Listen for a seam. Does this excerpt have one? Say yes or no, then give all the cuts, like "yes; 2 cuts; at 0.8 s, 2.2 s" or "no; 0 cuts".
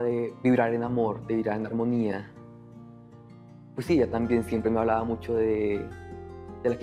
no; 0 cuts